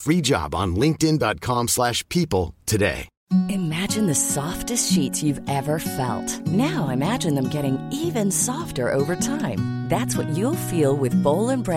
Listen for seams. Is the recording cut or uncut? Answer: cut